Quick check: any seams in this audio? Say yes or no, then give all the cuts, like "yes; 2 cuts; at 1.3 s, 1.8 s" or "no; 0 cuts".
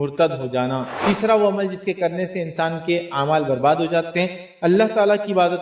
yes; 2 cuts; at 0.9 s, 4.1 s